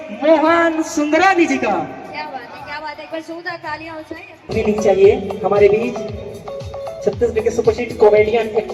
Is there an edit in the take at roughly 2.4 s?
no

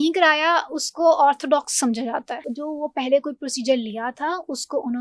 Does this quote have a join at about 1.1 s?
no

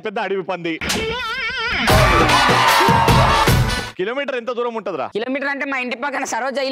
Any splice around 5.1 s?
yes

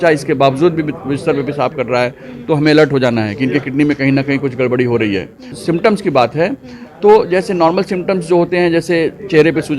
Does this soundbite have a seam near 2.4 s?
no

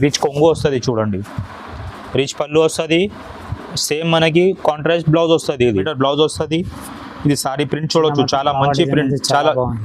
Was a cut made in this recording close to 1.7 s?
no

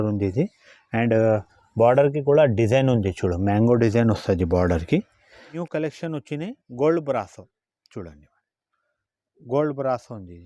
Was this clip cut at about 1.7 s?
no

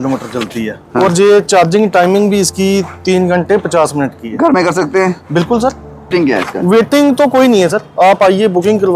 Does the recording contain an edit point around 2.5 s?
no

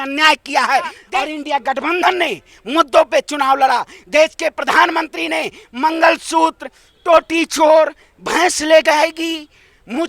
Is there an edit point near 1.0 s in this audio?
yes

